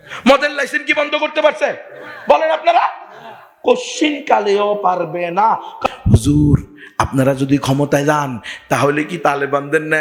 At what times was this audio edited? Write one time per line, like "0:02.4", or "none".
0:05.7